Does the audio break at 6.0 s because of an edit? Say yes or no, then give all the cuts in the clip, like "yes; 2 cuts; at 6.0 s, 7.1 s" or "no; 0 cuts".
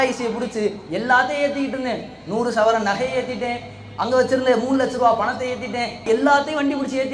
yes; 1 cut; at 6.0 s